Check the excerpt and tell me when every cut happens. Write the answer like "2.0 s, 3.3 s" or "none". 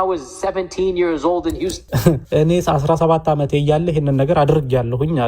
2.2 s